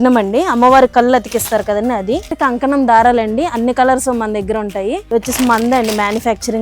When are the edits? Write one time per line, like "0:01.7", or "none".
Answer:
0:02.3
0:05.0